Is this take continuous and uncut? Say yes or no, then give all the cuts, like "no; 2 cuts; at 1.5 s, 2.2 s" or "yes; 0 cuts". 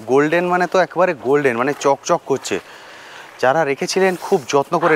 yes; 0 cuts